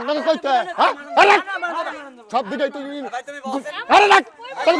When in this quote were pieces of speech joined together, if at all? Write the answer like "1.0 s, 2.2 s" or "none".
none